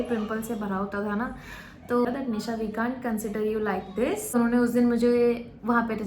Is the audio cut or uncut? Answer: cut